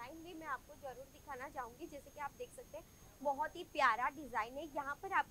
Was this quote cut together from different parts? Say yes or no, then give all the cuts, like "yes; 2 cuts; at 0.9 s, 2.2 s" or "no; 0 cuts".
no; 0 cuts